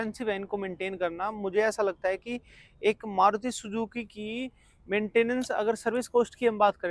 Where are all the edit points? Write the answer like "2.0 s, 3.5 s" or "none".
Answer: none